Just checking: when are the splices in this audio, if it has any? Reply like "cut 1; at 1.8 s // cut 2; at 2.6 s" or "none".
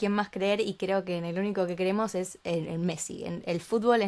none